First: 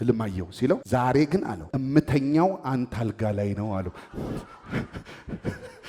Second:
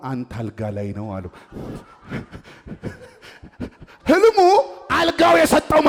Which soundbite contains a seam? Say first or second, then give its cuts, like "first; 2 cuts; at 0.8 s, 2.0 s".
first; 2 cuts; at 0.8 s, 1.7 s